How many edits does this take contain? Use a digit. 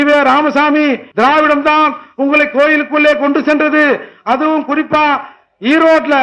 1